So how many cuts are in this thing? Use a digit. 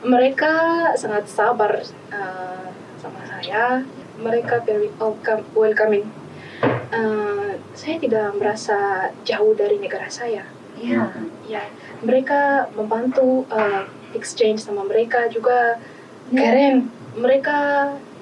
1